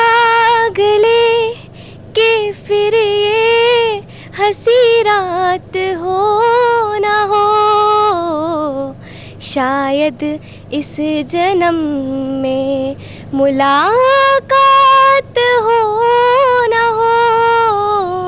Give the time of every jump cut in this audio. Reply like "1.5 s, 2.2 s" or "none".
none